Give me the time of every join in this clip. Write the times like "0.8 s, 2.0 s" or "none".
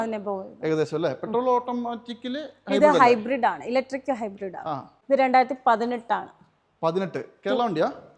4.9 s